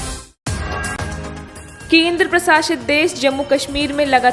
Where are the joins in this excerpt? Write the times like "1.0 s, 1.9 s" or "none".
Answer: 1.2 s